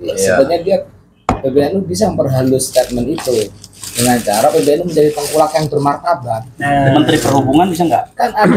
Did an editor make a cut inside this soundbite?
no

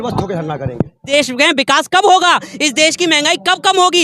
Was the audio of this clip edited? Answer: yes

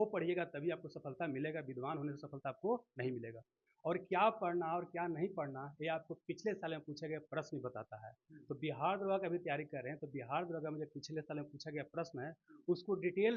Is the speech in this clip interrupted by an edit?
no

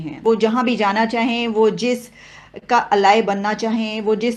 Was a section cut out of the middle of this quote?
no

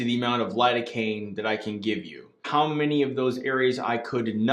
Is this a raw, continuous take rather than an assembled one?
no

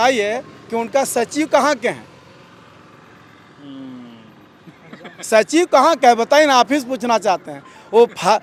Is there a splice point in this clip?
no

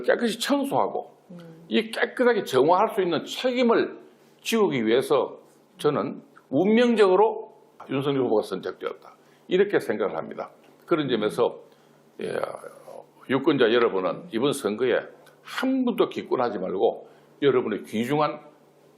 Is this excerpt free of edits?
no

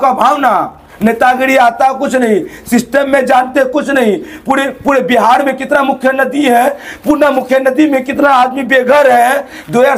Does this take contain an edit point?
no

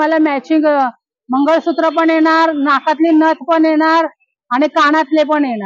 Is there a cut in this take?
no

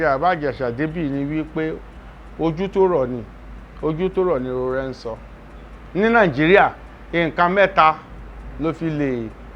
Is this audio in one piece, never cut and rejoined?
yes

